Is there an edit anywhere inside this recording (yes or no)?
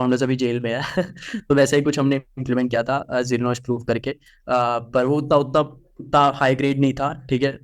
no